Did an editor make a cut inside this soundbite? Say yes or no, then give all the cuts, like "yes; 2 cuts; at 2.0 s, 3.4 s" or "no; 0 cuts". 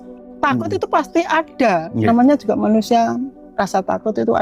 yes; 1 cut; at 2.0 s